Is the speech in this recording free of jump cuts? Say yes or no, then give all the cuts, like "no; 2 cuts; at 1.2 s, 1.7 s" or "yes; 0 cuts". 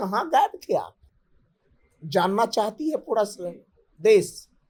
yes; 0 cuts